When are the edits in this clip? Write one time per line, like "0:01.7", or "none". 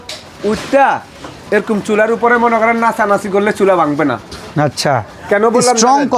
none